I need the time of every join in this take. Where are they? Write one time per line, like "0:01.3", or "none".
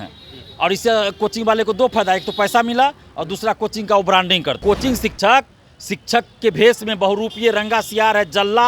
0:04.6